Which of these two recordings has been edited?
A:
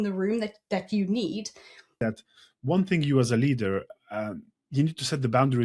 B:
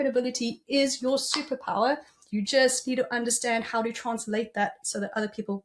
A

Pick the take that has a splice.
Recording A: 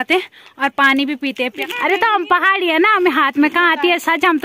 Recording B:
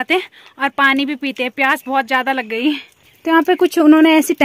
A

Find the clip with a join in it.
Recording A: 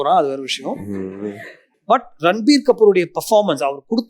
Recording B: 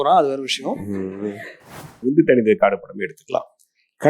B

